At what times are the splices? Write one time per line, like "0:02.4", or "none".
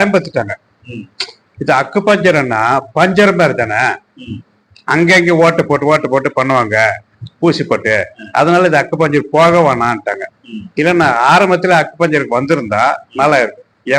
none